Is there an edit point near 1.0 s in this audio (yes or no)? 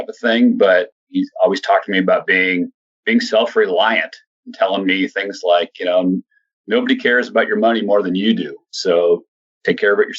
yes